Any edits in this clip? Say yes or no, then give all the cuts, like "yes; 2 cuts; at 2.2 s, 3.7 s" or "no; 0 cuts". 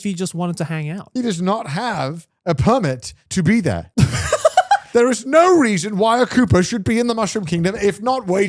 yes; 3 cuts; at 1.0 s, 3.8 s, 4.8 s